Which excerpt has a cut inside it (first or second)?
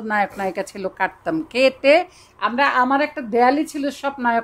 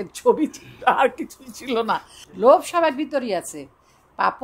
second